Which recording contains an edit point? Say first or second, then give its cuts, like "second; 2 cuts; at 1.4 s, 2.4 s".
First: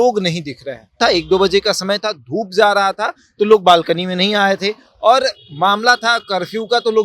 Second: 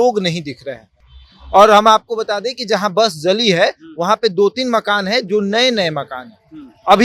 first; 1 cut; at 0.9 s